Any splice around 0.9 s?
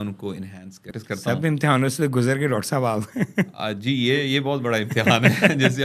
yes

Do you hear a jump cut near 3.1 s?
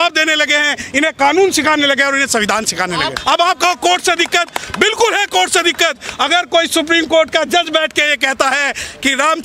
yes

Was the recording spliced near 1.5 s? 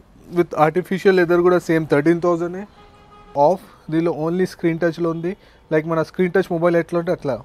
no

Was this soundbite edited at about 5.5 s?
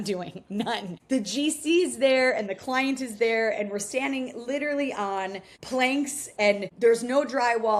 no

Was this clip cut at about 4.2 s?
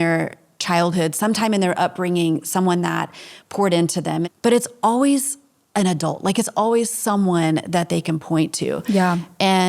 yes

